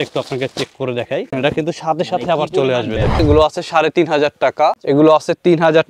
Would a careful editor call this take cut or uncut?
cut